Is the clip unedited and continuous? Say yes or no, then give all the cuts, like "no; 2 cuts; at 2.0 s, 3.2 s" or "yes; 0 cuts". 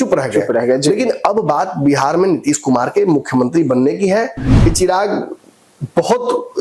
no; 1 cut; at 4.4 s